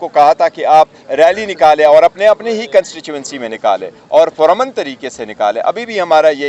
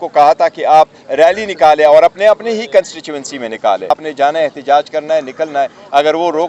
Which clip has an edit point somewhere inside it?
second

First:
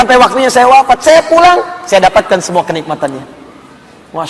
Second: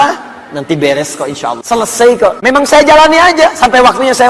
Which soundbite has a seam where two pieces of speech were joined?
second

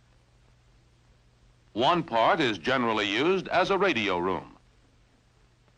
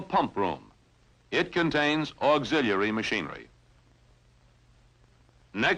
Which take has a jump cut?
first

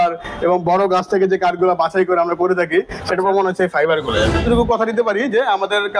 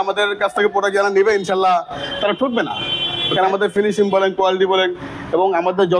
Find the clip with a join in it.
first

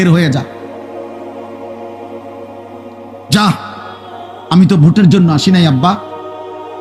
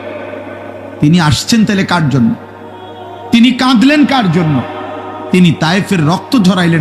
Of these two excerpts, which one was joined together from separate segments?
first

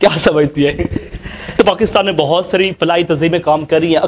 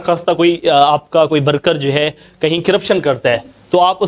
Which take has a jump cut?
first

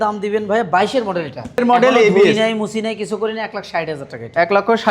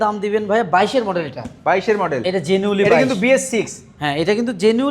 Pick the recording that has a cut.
first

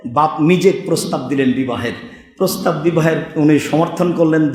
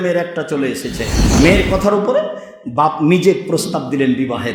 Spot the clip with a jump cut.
second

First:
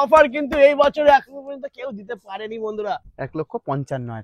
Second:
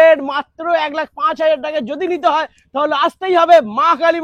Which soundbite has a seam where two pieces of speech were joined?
first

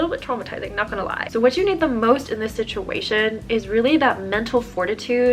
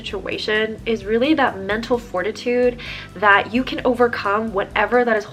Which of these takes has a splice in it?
first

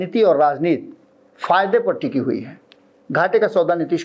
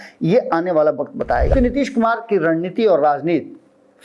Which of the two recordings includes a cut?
second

